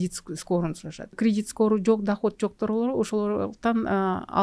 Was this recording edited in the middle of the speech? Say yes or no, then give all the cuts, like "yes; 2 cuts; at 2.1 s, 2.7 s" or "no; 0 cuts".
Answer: yes; 1 cut; at 1.1 s